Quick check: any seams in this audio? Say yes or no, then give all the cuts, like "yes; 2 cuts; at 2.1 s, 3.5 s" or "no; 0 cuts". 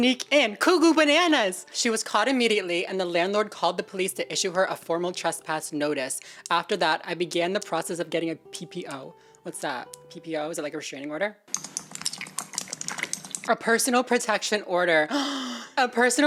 no; 0 cuts